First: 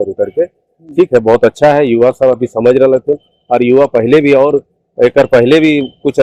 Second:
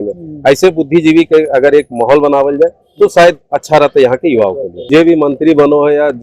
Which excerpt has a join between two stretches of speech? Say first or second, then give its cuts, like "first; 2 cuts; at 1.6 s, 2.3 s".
second; 1 cut; at 4.7 s